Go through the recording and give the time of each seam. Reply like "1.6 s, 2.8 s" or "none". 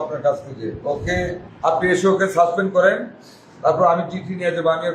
1.4 s